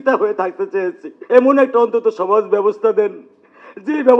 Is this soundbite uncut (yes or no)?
no